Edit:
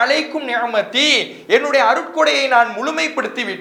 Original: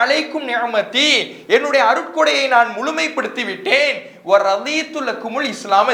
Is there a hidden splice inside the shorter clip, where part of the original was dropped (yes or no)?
no